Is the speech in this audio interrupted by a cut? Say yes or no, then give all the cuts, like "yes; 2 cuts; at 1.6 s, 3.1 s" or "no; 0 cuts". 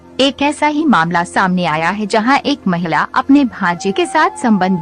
yes; 1 cut; at 2.2 s